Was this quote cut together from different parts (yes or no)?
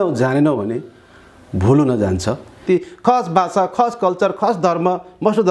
yes